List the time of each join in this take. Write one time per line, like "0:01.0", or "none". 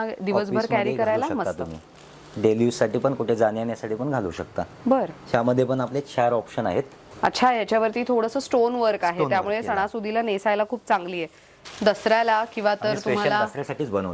0:07.0
0:11.6